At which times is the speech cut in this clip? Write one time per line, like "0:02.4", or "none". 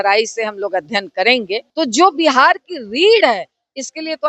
0:01.7